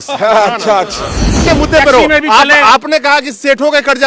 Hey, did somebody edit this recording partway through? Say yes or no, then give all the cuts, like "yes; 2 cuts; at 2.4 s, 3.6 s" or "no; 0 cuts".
yes; 1 cut; at 1.5 s